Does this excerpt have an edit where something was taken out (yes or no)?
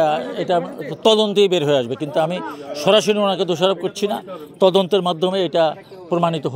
no